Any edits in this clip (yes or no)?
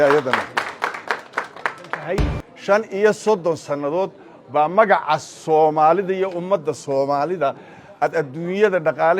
yes